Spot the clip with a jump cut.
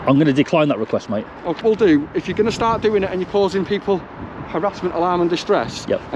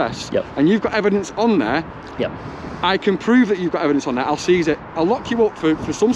first; 1 cut; at 1.6 s

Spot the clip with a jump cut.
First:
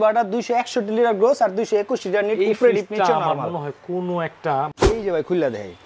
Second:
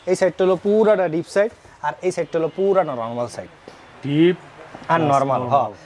first; 1 cut; at 4.9 s

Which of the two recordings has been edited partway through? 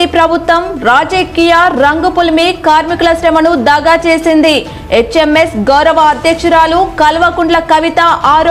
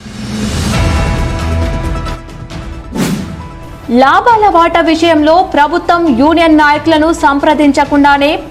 second; 2 cuts; at 2.3 s, 3.4 s

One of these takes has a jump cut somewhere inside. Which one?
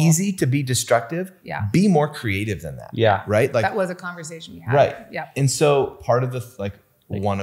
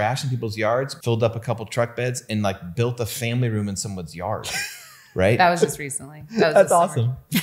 second; 1 cut; at 0.9 s

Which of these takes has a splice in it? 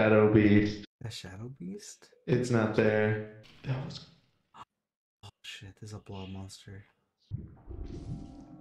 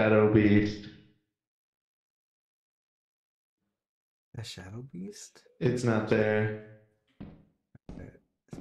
first; 3 cuts; at 0.9 s, 3.5 s, 7.3 s

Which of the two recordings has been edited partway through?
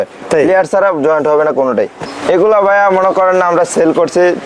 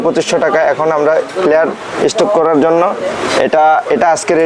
first; 1 cut; at 2.1 s

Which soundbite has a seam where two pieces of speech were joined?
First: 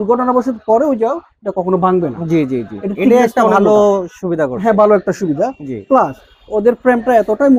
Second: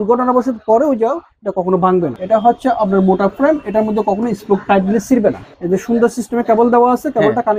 second; 2 cuts; at 2.2 s, 5.5 s

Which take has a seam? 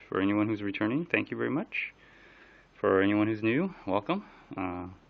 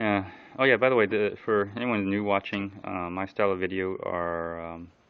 second; 1 cut; at 1.0 s

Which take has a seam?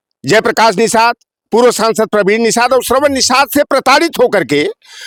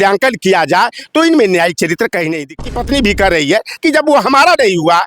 second; 1 cut; at 2.6 s

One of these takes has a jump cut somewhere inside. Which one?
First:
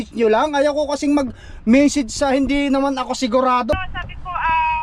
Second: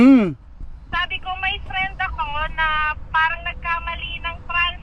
first; 1 cut; at 3.8 s

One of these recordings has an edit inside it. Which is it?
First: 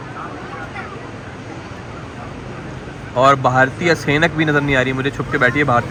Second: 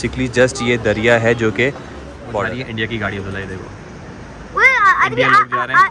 second; 1 cut; at 2.5 s

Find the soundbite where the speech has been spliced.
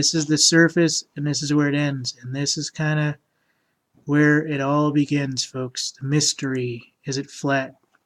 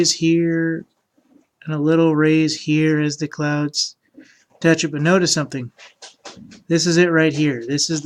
second; 1 cut; at 6.5 s

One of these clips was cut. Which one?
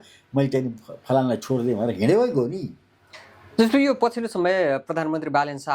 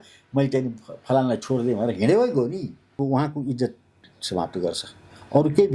second; 1 cut; at 3.0 s

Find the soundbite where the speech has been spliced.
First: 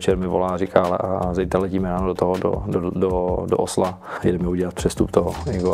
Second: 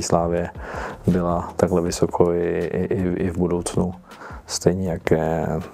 first; 1 cut; at 4.1 s

